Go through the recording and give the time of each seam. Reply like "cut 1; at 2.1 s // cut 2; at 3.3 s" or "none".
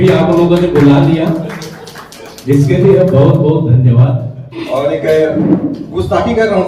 cut 1; at 4.6 s